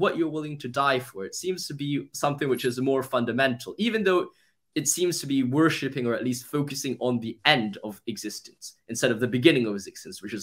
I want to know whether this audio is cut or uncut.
uncut